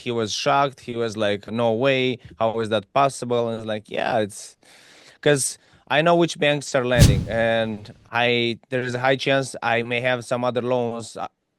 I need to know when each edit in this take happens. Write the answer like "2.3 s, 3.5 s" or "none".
1.5 s